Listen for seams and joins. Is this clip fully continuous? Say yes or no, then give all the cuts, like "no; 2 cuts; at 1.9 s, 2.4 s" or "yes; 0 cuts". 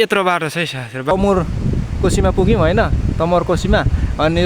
no; 1 cut; at 1.1 s